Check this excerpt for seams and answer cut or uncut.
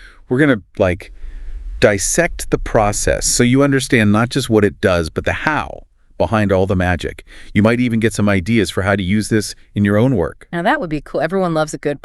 uncut